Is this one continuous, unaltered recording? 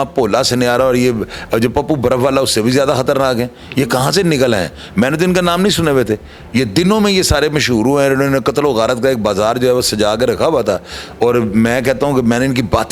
yes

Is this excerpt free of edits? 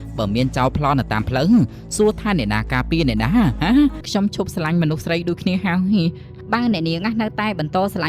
no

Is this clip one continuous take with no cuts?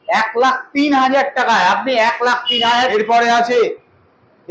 no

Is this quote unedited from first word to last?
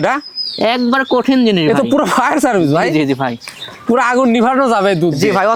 yes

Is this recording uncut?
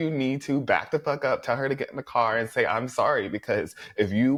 yes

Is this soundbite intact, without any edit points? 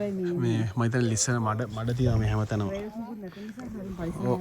yes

